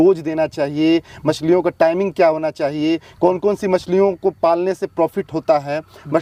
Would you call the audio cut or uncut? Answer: uncut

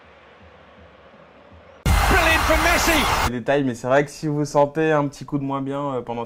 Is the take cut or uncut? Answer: uncut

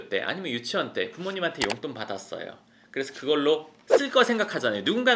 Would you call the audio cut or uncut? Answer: uncut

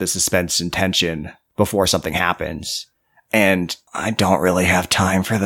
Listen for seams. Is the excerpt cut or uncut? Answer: cut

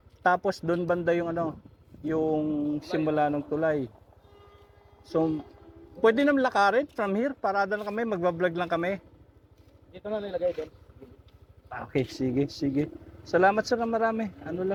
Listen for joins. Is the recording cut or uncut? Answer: uncut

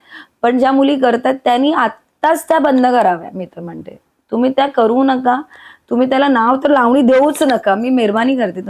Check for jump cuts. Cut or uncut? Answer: uncut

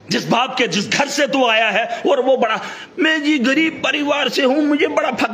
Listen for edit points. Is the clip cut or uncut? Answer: uncut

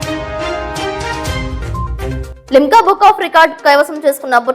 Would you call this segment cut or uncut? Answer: cut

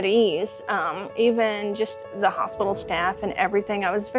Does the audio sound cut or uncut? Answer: uncut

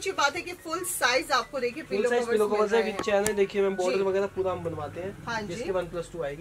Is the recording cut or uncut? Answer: uncut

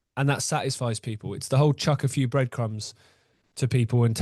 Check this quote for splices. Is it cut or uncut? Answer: uncut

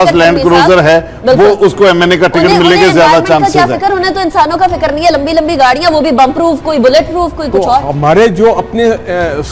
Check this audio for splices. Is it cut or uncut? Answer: uncut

